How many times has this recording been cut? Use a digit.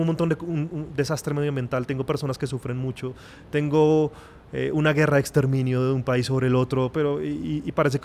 0